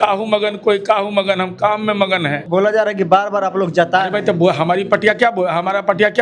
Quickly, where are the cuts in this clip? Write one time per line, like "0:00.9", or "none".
0:02.5